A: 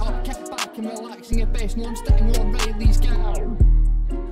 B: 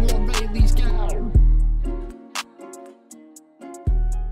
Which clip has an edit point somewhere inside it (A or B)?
A